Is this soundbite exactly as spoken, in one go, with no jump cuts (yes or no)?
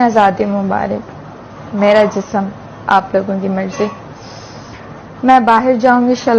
yes